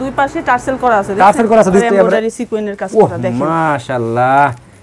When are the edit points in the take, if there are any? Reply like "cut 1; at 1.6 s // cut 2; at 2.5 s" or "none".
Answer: cut 1; at 1.8 s